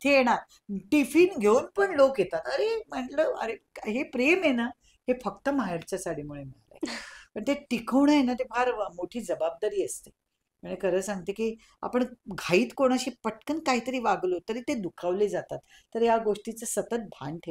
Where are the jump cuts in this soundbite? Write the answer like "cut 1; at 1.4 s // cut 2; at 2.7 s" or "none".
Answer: none